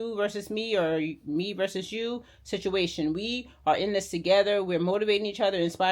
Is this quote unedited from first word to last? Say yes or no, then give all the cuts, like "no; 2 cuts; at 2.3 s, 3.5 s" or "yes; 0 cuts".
yes; 0 cuts